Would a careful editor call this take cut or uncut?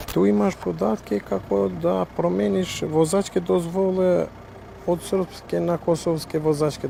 uncut